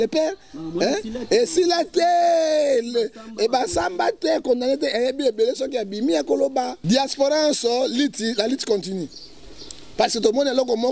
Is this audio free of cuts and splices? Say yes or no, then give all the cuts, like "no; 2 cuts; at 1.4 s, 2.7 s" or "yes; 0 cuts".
no; 1 cut; at 6.8 s